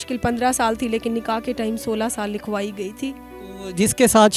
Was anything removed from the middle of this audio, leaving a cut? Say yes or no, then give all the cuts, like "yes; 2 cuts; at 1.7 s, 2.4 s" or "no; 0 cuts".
no; 0 cuts